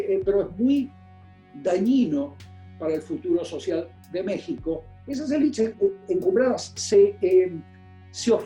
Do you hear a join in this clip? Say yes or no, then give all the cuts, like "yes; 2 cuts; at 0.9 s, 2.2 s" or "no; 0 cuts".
yes; 1 cut; at 4.9 s